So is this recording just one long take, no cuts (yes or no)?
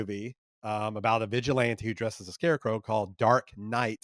yes